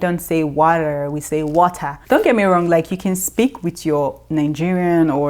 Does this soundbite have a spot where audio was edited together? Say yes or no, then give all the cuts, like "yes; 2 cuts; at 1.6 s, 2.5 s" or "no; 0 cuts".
yes; 1 cut; at 2.0 s